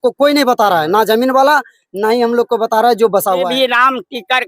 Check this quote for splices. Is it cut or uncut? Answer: cut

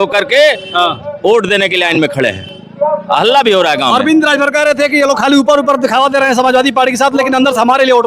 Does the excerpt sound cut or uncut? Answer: uncut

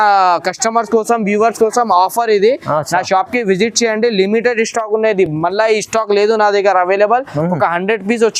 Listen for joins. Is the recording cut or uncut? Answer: uncut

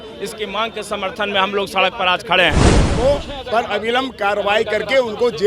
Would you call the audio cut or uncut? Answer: cut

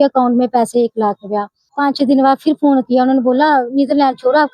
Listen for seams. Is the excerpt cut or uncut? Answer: cut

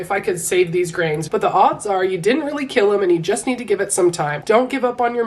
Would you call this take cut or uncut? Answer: cut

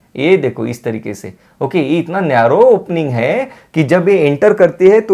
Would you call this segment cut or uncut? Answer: uncut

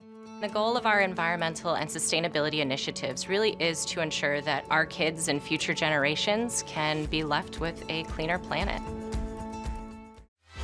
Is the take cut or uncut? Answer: uncut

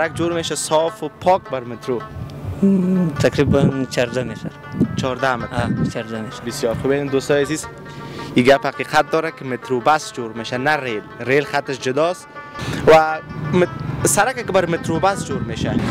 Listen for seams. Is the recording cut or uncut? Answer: uncut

